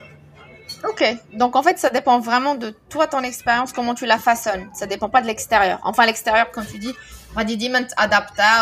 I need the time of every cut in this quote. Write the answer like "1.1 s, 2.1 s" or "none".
none